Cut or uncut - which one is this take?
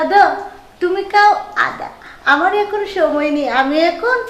uncut